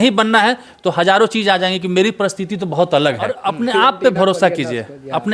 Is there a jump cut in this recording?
yes; 1 cut; at 3.3 s

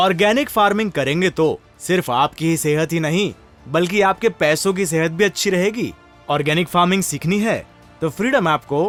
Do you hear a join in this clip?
no; 0 cuts

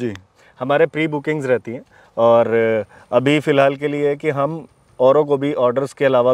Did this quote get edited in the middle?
no; 0 cuts

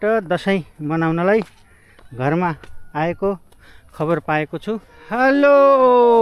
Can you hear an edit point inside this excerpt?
yes; 1 cut; at 4.9 s

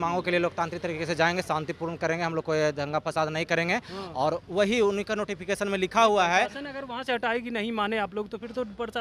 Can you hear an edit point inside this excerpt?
no; 0 cuts

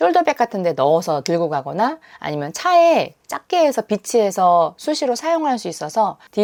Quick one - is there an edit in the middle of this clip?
no; 0 cuts

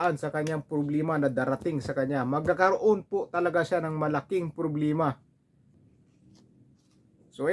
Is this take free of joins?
no; 1 cut; at 5.7 s

